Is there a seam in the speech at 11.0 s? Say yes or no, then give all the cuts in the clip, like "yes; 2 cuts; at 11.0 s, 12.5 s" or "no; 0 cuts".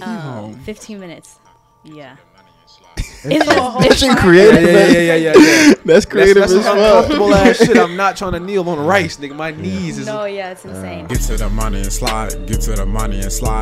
yes; 1 cut; at 11.0 s